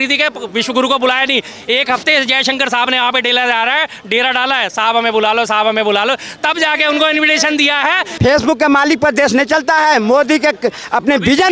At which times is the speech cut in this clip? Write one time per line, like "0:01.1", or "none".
0:08.1